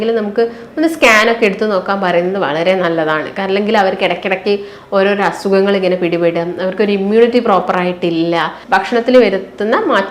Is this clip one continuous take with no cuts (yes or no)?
no